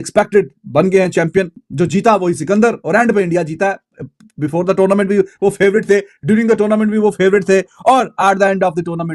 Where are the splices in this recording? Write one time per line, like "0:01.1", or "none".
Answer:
none